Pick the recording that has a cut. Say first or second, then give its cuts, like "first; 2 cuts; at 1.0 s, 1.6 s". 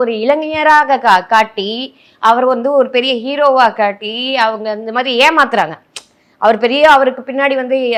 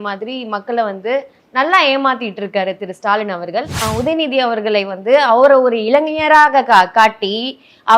second; 1 cut; at 3.8 s